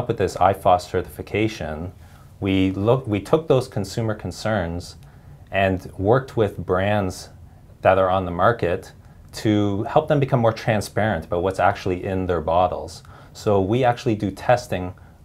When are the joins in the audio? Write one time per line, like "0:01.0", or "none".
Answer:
none